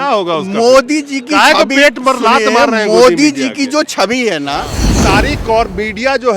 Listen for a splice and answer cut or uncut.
cut